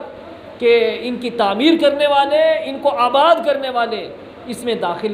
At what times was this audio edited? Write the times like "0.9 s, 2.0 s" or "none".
none